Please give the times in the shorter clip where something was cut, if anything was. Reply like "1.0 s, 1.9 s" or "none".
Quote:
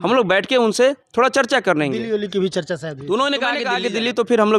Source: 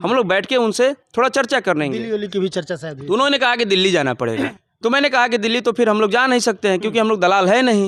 3.7 s